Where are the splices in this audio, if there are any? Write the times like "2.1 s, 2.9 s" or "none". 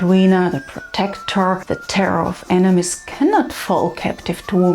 1.6 s